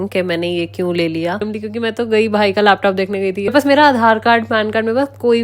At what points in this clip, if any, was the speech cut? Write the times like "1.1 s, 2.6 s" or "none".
1.4 s, 3.5 s